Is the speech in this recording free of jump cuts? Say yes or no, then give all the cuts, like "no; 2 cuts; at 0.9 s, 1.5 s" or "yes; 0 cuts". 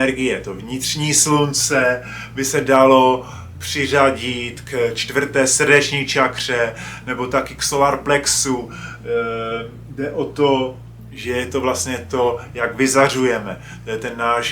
yes; 0 cuts